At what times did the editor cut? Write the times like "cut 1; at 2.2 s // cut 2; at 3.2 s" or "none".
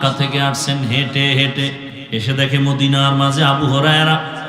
cut 1; at 1.9 s